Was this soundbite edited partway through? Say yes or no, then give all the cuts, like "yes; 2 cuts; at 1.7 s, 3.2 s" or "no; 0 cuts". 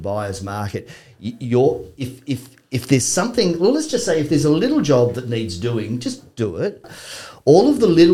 yes; 1 cut; at 6.9 s